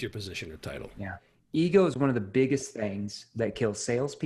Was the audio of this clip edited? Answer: yes; 1 cut; at 1.4 s

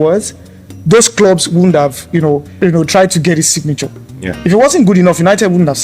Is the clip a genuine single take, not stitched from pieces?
no; 1 cut; at 2.5 s

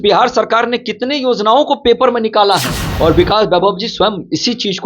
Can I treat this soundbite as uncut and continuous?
no; 1 cut; at 2.8 s

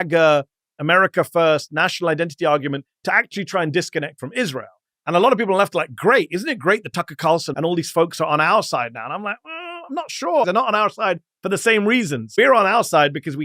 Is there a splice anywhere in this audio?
yes; 3 cuts; at 7.5 s, 10.5 s, 12.3 s

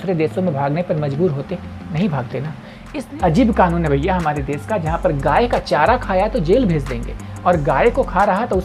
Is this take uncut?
no; 1 cut; at 2.8 s

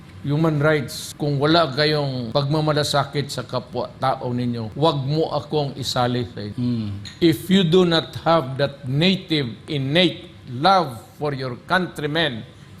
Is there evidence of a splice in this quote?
yes; 4 cuts; at 1.0 s, 2.3 s, 4.7 s, 6.4 s

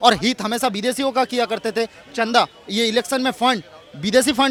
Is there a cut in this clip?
no; 0 cuts

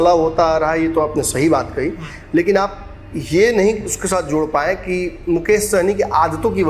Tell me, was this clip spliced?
no; 0 cuts

